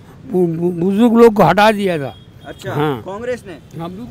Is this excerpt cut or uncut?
uncut